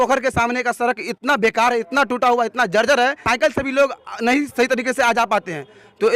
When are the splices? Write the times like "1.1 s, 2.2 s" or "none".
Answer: none